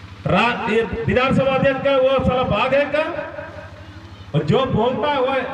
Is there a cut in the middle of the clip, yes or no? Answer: no